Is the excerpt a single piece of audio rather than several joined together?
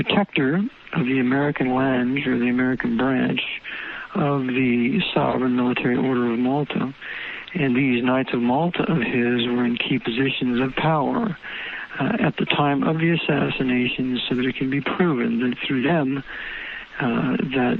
no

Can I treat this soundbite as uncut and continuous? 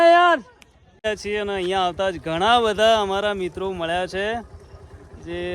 no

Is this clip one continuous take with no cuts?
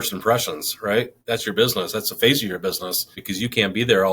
no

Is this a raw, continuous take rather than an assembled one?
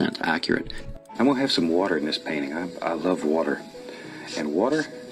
no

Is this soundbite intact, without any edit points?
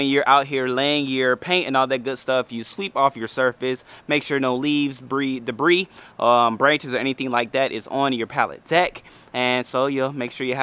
yes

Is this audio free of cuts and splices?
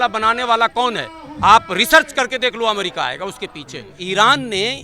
no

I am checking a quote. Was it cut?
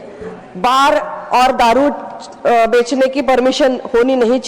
no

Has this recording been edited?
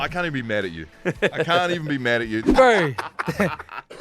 yes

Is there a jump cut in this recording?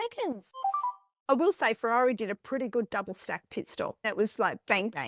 yes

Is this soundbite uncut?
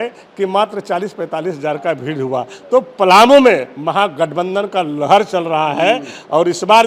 yes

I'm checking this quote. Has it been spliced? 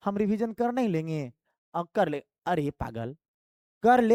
no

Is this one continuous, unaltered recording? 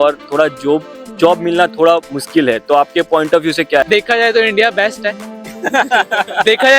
no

